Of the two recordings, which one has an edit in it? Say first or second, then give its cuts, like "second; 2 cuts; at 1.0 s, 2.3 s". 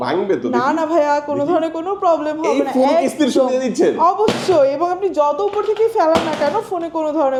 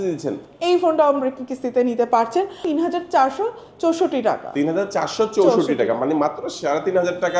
second; 1 cut; at 2.6 s